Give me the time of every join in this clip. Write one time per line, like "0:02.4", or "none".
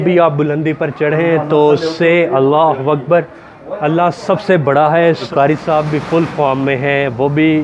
0:05.3